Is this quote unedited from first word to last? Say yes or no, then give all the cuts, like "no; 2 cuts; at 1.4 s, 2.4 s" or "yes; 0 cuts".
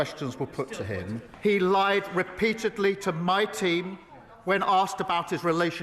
no; 1 cut; at 1.3 s